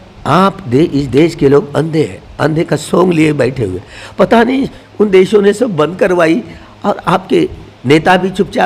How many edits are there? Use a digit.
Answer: 0